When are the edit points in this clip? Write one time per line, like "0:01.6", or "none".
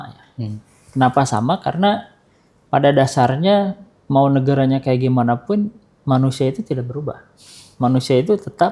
none